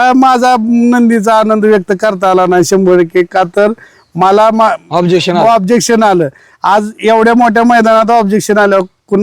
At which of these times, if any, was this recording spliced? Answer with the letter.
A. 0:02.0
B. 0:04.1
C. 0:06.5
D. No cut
D